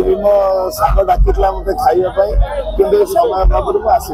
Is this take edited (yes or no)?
no